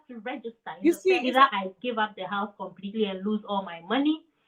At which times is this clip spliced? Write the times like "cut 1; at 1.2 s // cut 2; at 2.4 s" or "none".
cut 1; at 1.2 s